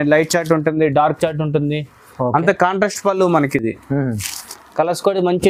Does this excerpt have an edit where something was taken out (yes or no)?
no